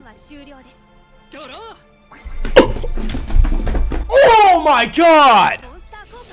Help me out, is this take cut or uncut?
uncut